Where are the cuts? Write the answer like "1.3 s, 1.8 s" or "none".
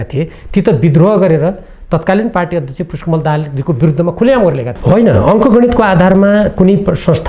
4.7 s

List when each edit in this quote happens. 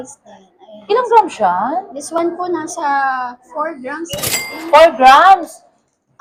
none

